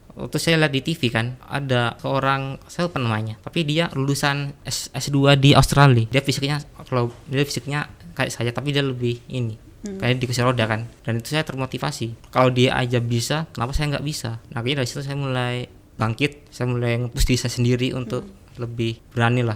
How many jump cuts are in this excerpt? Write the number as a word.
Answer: four